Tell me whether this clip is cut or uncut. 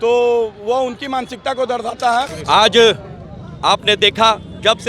cut